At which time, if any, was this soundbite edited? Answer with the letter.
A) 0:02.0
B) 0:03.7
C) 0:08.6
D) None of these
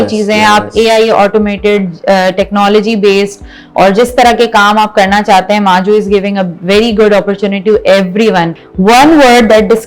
C